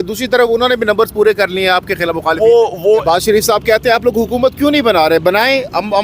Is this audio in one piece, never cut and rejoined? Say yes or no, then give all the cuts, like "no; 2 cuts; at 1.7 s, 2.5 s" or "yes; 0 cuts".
no; 1 cut; at 3.0 s